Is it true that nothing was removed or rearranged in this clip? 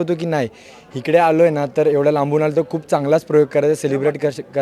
yes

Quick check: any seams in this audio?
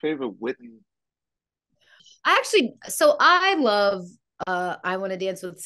yes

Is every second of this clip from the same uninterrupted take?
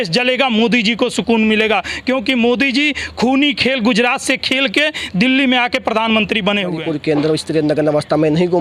no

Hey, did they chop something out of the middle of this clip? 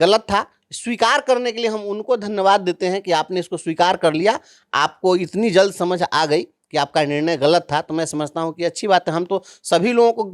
no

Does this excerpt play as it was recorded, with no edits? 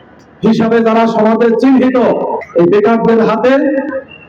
no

